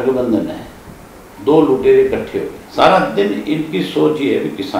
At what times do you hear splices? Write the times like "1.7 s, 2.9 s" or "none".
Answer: 2.6 s